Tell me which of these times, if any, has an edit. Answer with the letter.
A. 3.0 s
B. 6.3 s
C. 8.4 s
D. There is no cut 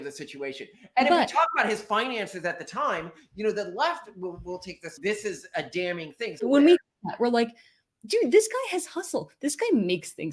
B